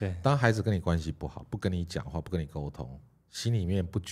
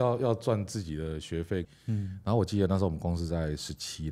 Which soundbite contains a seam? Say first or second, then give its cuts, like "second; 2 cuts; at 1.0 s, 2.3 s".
second; 1 cut; at 1.7 s